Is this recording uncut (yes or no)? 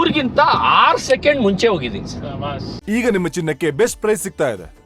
no